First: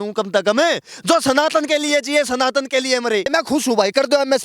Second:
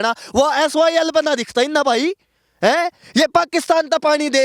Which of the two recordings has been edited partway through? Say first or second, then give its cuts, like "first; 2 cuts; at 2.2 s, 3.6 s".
first; 1 cut; at 3.3 s